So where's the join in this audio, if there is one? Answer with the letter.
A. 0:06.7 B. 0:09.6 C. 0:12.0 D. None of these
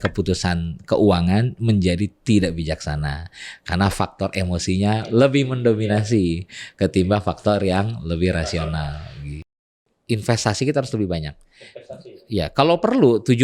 B